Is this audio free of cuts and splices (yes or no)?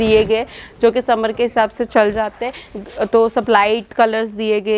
yes